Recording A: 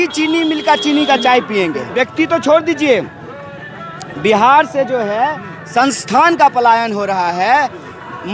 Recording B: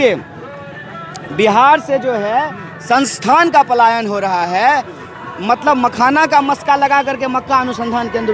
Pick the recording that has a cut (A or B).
A